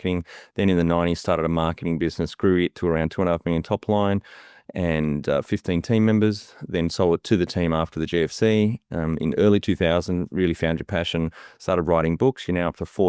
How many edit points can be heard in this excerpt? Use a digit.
0